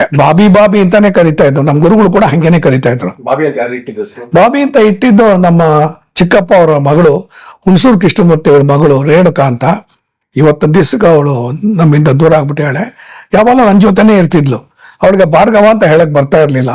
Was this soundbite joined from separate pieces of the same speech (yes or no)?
no